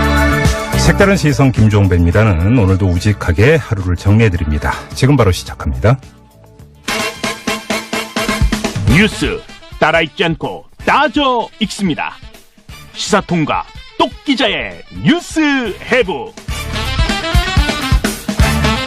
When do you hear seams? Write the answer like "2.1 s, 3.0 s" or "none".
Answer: 14.9 s